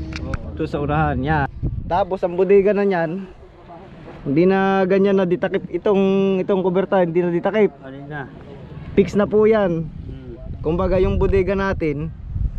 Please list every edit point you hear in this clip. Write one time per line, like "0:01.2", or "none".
0:01.5